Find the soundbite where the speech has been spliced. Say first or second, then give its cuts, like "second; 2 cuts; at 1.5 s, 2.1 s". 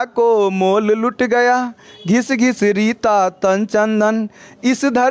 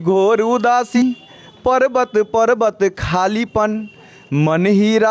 second; 1 cut; at 1.0 s